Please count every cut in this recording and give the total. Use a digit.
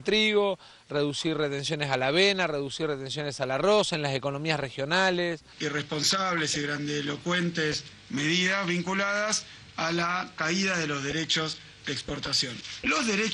1